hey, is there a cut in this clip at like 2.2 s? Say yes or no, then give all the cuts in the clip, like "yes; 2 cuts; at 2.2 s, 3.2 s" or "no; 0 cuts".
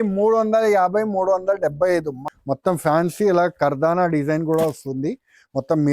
yes; 1 cut; at 2.2 s